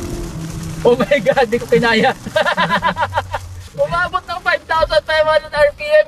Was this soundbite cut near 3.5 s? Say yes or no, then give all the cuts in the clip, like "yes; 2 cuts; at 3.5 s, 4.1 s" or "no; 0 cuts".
yes; 1 cut; at 3.5 s